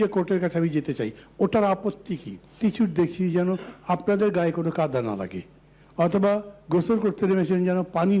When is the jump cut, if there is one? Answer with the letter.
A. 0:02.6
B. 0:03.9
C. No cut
A